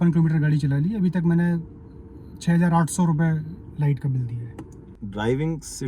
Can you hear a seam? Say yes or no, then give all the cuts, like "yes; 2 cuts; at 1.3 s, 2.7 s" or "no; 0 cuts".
yes; 1 cut; at 4.9 s